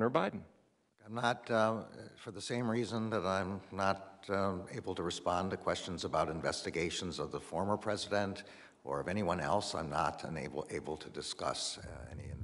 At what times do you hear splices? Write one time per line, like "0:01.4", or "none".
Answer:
none